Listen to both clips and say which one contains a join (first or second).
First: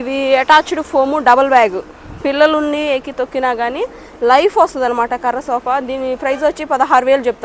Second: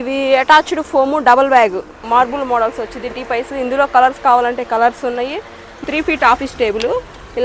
second